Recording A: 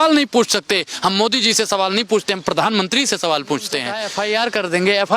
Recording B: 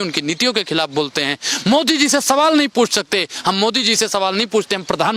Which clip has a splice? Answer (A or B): A